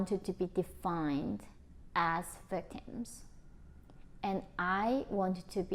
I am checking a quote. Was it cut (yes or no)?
no